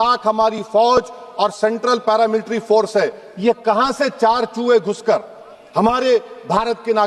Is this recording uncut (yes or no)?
yes